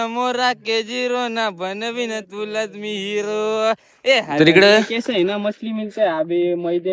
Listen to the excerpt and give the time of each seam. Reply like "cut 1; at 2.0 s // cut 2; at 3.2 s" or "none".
cut 1; at 4.3 s